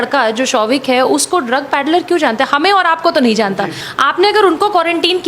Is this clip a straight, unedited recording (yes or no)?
no